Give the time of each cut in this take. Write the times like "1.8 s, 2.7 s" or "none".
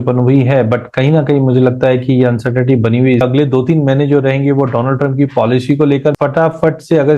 3.2 s, 6.2 s